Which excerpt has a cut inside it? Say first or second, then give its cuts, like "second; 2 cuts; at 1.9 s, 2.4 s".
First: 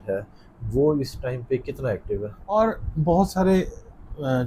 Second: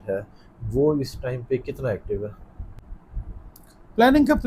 first; 1 cut; at 2.4 s